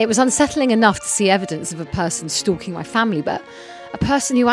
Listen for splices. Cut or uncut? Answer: uncut